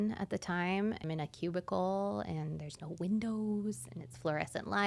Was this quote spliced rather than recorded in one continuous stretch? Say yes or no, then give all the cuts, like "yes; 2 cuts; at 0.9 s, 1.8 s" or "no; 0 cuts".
yes; 1 cut; at 1.0 s